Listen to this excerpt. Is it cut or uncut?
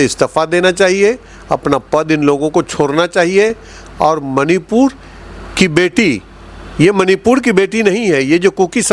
uncut